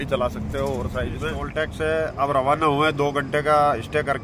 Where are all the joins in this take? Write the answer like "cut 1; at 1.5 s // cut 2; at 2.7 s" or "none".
cut 1; at 1.4 s